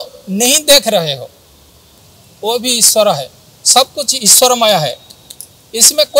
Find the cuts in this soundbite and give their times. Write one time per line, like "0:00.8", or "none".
0:01.5